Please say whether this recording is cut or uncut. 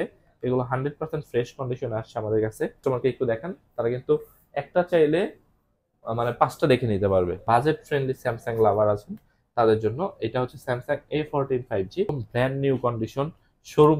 cut